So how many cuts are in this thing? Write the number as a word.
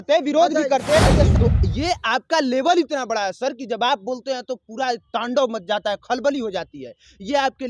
one